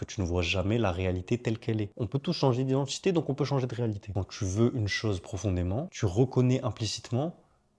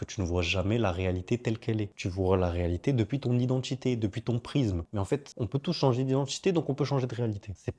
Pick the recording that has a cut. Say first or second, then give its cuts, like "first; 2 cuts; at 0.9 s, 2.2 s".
first; 2 cuts; at 1.9 s, 4.2 s